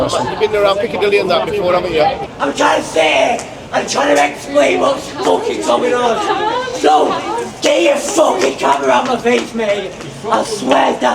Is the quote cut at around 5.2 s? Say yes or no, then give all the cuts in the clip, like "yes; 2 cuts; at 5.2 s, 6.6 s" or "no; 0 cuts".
no; 1 cut; at 2.2 s